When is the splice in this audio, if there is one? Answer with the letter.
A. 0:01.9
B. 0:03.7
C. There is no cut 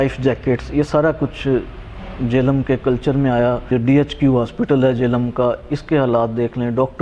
B